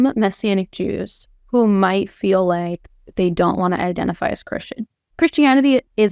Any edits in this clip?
yes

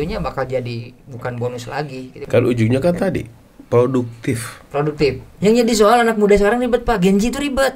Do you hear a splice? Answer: yes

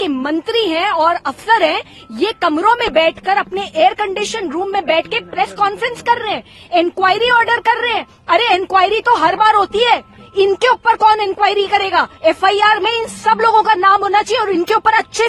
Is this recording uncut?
yes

